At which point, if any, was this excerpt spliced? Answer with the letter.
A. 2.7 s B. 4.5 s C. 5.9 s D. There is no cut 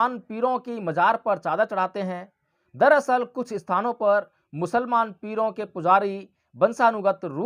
D